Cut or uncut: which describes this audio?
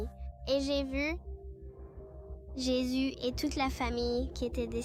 uncut